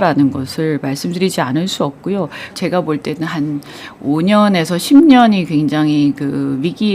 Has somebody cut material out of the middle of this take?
no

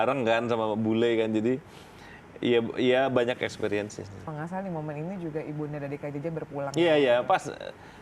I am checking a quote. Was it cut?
yes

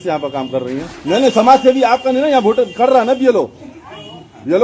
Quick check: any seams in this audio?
yes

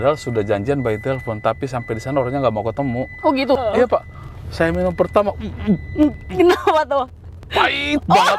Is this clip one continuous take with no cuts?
no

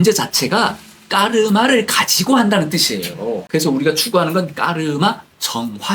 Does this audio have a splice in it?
yes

